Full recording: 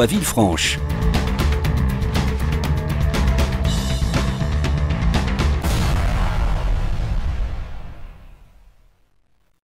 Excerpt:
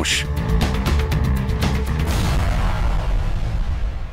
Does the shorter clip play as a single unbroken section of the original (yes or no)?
no